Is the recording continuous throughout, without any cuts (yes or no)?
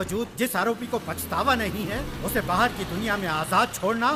yes